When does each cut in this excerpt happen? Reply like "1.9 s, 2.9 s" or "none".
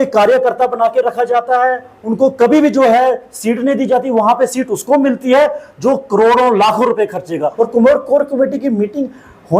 7.5 s